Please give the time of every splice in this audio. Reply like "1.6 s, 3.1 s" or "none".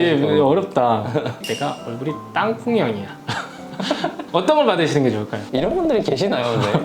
1.4 s, 5.4 s